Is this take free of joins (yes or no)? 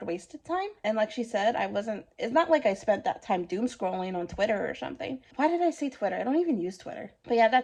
yes